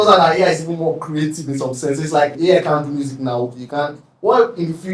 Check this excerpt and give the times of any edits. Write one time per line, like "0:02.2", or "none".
0:02.3
0:04.0